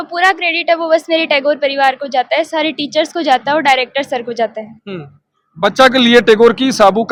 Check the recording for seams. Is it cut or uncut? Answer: uncut